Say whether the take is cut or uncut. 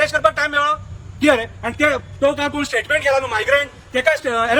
uncut